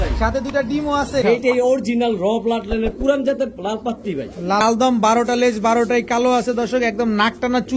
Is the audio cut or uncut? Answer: cut